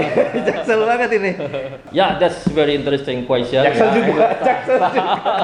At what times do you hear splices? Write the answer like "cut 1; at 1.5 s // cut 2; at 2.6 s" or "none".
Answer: cut 1; at 1.8 s